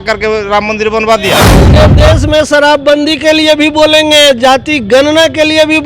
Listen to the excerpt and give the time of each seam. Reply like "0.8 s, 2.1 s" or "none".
1.7 s